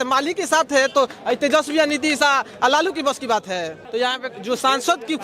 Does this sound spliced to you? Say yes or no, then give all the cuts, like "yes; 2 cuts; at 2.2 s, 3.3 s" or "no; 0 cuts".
yes; 1 cut; at 3.8 s